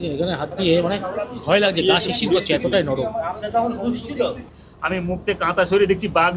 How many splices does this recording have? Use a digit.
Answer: 1